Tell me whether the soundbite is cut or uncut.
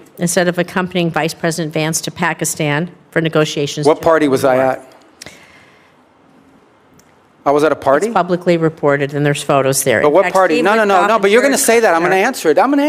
uncut